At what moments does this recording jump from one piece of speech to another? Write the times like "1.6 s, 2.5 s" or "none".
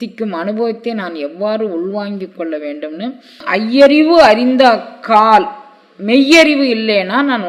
3.4 s